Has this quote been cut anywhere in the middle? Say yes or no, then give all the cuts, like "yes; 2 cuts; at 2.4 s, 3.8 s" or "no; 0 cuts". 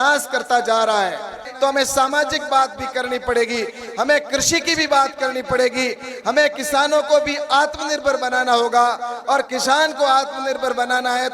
yes; 1 cut; at 1.4 s